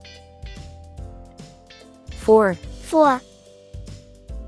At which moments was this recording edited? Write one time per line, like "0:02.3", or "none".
0:02.3
0:03.2